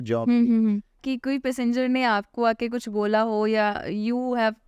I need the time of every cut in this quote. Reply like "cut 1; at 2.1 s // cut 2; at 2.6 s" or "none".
cut 1; at 1.0 s